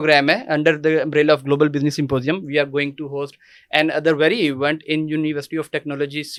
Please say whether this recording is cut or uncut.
uncut